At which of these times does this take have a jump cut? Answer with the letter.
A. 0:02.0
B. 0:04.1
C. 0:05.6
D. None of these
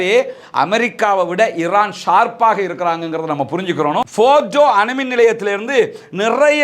B